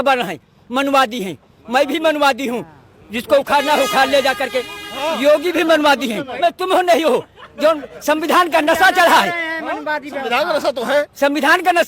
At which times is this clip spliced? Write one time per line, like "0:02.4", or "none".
0:06.3